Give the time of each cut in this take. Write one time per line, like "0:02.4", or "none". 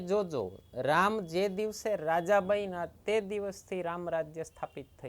none